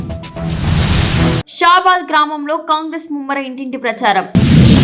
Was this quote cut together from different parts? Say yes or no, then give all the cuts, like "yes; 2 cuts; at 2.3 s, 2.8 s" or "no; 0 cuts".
no; 0 cuts